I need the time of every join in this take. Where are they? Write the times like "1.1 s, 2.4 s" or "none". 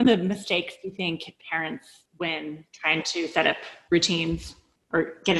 none